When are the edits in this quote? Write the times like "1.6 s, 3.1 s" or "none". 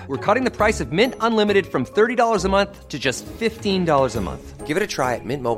none